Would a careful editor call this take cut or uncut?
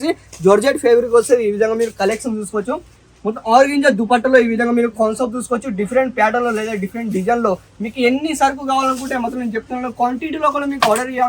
uncut